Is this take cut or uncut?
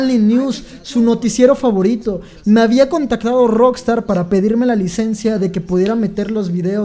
uncut